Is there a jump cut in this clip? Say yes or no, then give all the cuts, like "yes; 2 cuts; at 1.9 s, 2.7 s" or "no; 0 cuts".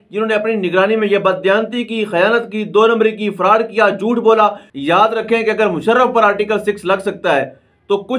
yes; 1 cut; at 4.7 s